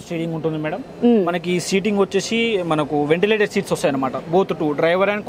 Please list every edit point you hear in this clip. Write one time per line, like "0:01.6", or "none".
none